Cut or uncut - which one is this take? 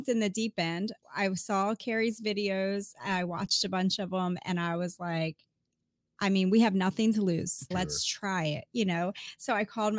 cut